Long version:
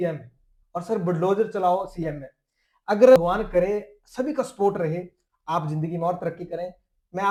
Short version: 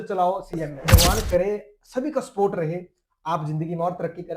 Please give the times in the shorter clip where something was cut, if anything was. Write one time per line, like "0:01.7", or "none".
0:01.0